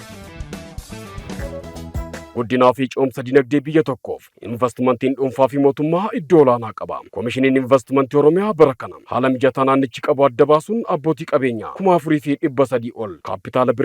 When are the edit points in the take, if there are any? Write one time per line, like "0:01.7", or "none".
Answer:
0:01.2